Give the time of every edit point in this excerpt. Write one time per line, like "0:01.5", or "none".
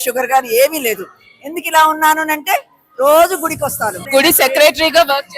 0:04.0